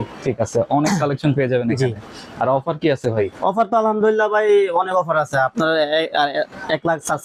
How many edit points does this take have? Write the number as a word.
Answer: zero